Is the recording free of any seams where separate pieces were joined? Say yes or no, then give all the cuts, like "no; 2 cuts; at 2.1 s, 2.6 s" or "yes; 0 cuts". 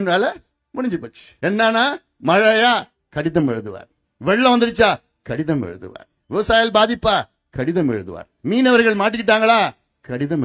no; 1 cut; at 1.2 s